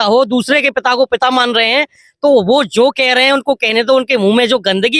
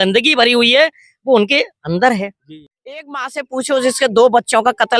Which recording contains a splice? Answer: second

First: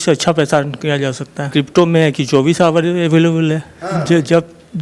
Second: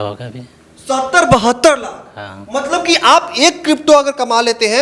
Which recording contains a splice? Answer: first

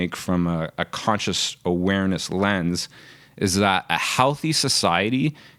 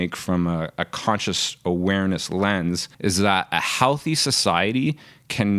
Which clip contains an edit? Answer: second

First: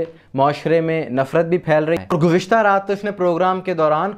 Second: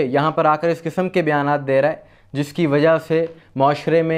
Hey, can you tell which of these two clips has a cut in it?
first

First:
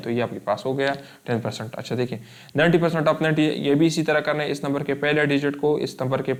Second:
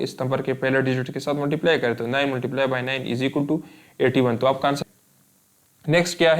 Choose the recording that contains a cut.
second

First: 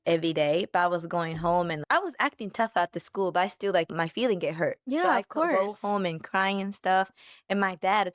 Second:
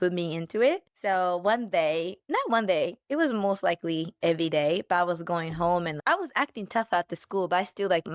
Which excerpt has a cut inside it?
second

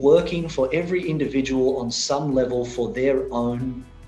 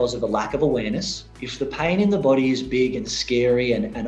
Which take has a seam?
second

